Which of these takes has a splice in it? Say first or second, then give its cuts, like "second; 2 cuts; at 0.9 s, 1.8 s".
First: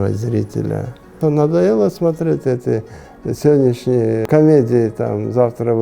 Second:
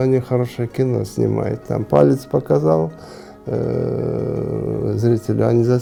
first; 2 cuts; at 1.2 s, 4.2 s